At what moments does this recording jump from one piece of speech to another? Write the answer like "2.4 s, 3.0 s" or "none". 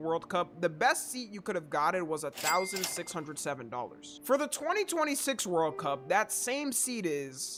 none